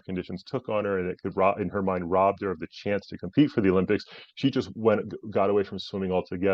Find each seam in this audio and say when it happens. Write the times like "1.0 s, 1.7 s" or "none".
none